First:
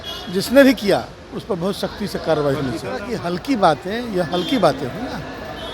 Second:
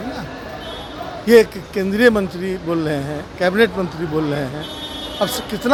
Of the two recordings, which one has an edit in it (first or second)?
first